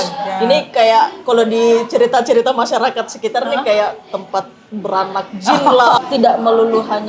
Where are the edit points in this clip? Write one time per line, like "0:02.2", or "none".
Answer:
0:06.0